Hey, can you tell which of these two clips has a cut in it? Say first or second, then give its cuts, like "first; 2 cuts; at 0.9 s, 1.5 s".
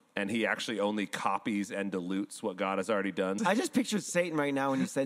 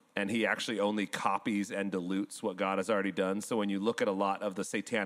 first; 1 cut; at 3.4 s